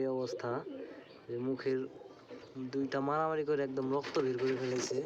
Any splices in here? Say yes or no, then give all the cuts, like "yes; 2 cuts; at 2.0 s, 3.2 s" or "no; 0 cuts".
no; 0 cuts